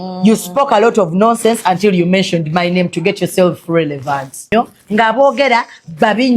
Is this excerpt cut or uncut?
cut